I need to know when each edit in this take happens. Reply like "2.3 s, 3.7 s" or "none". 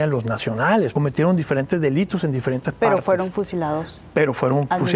0.9 s